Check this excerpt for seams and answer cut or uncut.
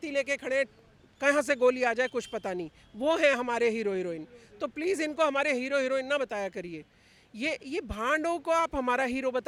uncut